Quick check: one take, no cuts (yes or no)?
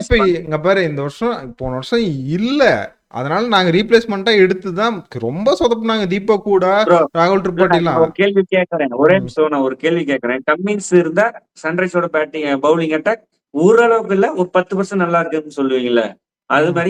yes